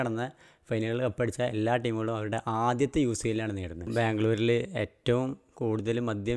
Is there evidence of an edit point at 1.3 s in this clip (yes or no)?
no